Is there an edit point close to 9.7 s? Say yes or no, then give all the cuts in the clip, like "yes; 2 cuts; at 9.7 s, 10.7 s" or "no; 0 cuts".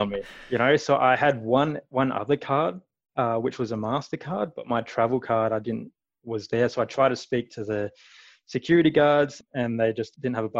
yes; 1 cut; at 9.7 s